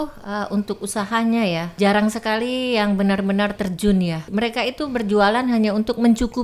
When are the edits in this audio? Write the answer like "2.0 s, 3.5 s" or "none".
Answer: 1.7 s, 4.2 s